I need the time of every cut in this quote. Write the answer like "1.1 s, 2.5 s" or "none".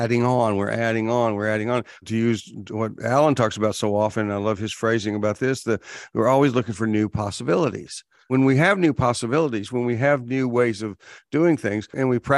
none